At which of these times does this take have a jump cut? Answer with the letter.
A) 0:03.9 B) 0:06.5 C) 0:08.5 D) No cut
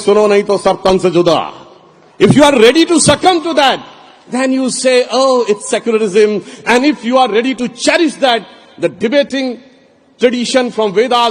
D